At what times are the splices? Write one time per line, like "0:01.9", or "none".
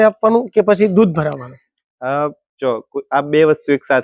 none